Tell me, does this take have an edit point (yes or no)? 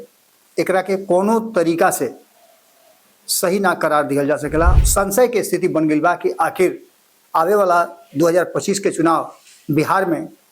yes